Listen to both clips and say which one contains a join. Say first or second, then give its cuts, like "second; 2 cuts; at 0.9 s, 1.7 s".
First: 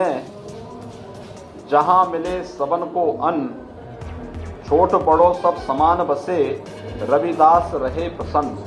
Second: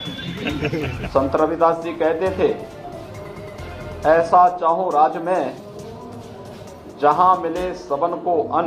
second; 1 cut; at 1.0 s